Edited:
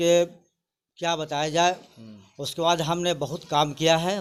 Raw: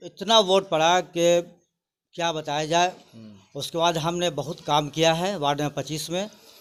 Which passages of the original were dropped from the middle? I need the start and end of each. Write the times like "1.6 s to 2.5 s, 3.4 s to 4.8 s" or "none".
none